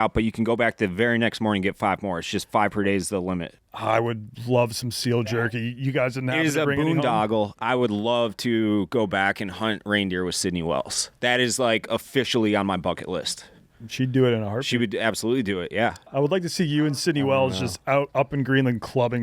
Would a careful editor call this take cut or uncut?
cut